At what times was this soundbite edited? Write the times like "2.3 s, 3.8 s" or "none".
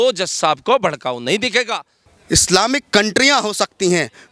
2.0 s